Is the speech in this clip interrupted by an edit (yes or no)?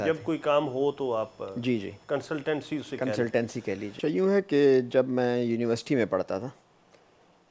yes